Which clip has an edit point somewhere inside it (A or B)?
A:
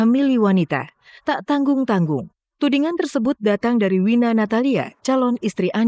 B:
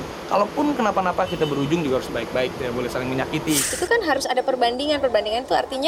B